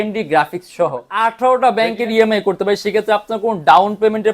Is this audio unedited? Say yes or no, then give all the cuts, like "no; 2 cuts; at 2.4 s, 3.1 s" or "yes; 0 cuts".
no; 1 cut; at 1.1 s